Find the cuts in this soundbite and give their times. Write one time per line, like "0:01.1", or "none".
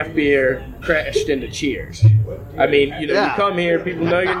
none

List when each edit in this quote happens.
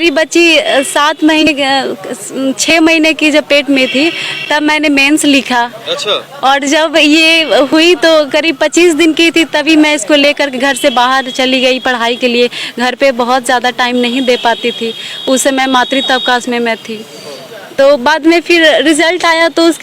0:01.4

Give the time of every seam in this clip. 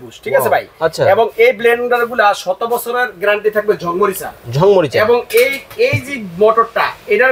none

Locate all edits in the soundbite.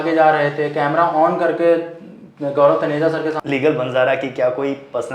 0:03.4

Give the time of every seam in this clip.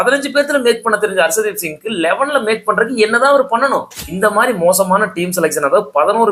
0:04.0

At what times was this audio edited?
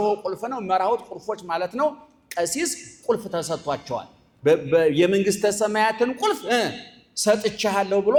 none

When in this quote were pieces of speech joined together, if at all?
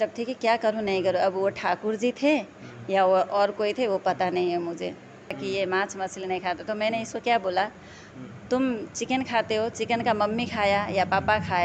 0:05.4

